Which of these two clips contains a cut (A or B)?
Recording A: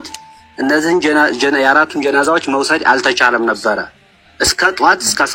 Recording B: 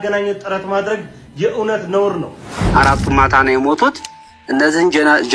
B